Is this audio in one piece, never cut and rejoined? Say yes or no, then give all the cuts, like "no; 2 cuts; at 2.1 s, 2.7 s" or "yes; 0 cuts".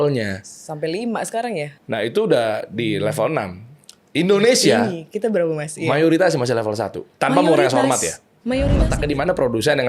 no; 2 cuts; at 1.8 s, 8.9 s